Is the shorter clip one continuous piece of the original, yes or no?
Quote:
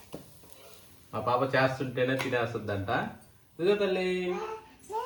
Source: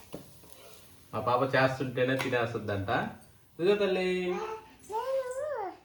yes